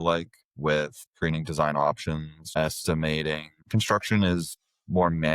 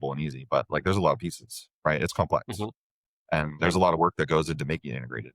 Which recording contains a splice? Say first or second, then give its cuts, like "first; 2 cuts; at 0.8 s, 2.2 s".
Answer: first; 3 cuts; at 1.0 s, 2.4 s, 3.5 s